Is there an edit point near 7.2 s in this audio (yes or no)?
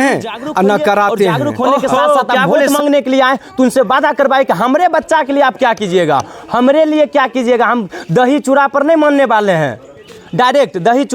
no